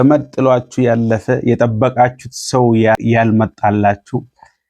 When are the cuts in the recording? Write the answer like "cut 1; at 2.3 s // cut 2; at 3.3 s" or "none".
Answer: cut 1; at 3.0 s